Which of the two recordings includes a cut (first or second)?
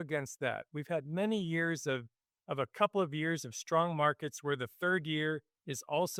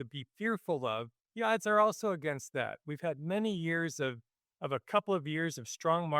second